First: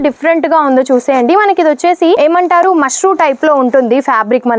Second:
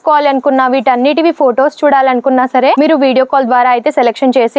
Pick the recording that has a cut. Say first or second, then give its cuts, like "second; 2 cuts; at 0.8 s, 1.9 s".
first; 1 cut; at 2.2 s